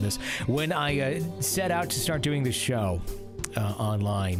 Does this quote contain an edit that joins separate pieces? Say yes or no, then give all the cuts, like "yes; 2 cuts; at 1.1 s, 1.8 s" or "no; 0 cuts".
no; 0 cuts